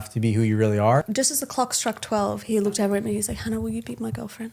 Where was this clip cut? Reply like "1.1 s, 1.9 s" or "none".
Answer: 1.1 s